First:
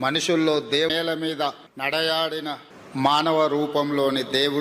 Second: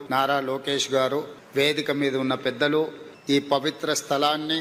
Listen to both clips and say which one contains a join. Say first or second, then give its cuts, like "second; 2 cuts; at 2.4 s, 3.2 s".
first; 1 cut; at 0.9 s